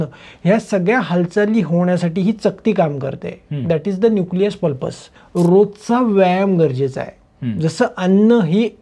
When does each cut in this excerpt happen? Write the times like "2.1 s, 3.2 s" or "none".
5.2 s